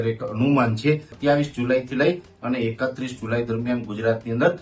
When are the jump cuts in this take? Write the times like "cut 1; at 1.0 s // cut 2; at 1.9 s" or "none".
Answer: cut 1; at 1.1 s